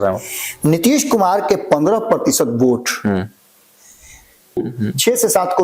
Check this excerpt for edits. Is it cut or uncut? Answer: cut